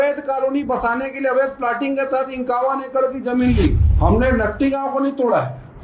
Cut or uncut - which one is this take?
cut